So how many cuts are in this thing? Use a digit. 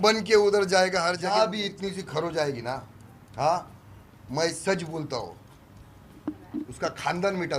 1